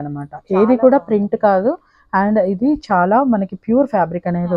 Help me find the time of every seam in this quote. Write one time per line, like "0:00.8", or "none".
none